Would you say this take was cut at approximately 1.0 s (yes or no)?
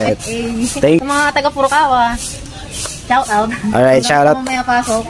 yes